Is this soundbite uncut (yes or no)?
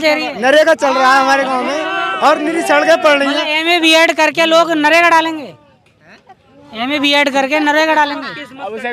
yes